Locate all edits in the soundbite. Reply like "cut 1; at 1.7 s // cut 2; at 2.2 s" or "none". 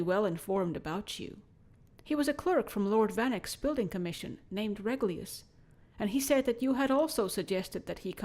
cut 1; at 2.3 s